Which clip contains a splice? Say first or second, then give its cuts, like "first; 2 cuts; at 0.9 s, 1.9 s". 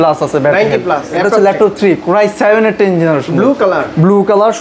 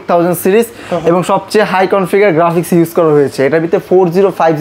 first; 1 cut; at 1.1 s